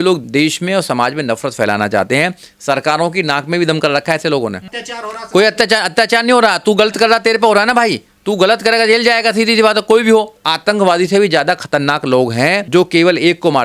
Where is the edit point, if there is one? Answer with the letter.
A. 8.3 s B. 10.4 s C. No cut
B